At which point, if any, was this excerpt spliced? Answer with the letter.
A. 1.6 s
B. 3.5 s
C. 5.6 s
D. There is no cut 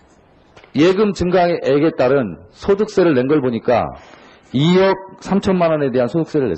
A